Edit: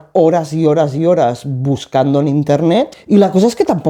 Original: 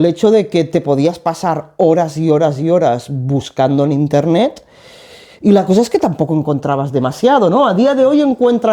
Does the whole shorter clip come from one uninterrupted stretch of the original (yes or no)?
no